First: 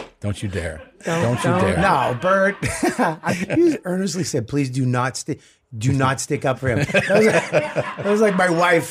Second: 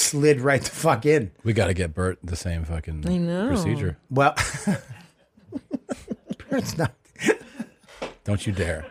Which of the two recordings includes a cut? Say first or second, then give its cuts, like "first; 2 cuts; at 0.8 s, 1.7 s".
first; 1 cut; at 3.2 s